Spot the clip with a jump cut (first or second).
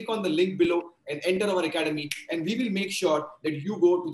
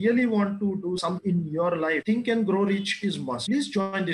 second